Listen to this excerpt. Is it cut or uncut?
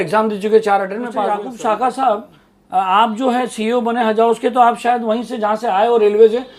cut